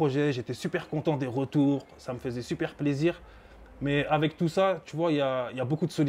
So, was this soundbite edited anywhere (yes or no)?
no